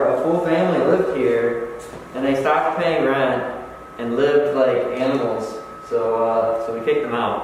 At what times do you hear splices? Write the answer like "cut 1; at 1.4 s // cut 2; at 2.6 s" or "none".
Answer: none